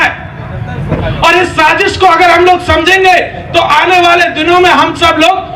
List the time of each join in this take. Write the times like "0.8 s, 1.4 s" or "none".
none